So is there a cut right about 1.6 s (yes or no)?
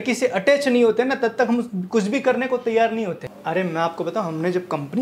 no